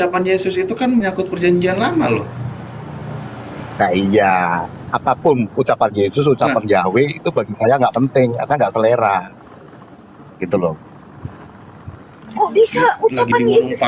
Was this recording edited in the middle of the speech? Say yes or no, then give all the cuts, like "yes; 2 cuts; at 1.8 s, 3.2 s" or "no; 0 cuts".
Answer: no; 0 cuts